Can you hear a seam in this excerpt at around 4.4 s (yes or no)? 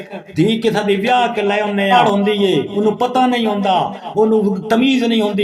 no